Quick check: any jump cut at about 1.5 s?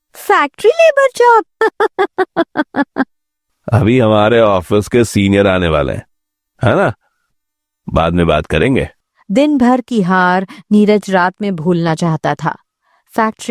yes; 2 cuts; at 1.5 s, 9.0 s

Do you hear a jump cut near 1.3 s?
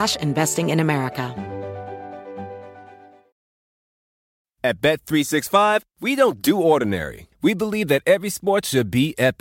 yes; 1 cut; at 1.3 s

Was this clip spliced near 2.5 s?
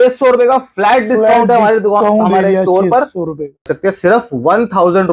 no; 1 cut; at 3.7 s

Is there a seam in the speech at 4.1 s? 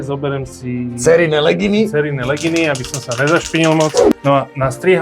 yes; 1 cut; at 4.1 s

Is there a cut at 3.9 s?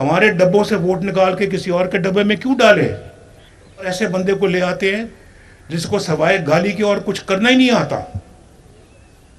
yes; 1 cut; at 3.9 s

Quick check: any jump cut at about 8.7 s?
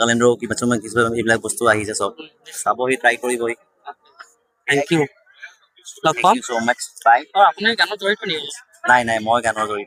no; 0 cuts

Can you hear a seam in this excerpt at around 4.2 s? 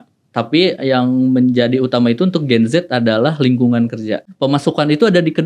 yes; 1 cut; at 4.2 s

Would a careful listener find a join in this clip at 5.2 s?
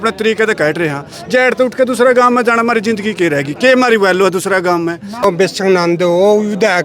yes; 1 cut; at 5.2 s

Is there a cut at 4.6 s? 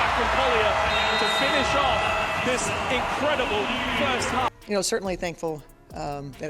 yes; 1 cut; at 4.6 s

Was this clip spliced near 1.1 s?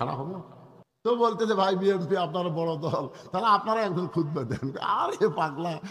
yes; 1 cut; at 1.1 s

